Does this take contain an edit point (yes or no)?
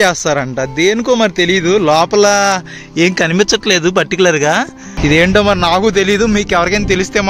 yes